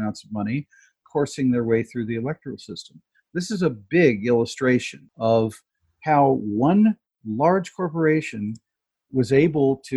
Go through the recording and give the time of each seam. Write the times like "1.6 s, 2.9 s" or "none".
5.0 s